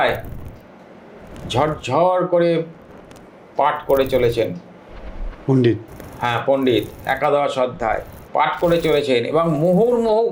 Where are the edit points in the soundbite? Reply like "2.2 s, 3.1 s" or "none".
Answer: none